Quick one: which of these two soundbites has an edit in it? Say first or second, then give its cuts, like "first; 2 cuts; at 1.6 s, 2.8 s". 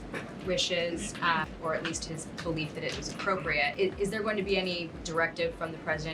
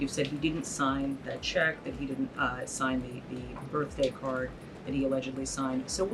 first; 3 cuts; at 1.5 s, 3.7 s, 5.0 s